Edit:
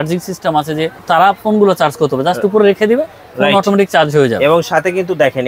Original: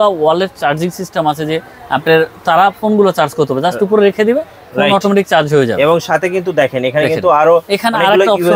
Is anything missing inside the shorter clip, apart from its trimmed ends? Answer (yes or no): yes